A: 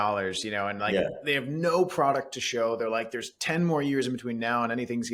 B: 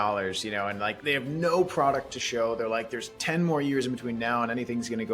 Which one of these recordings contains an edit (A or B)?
B